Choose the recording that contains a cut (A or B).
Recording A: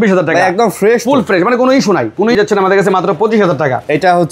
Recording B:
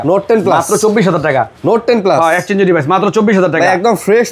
A